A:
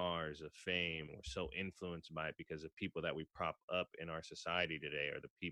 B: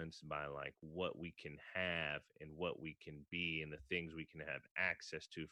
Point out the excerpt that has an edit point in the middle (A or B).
A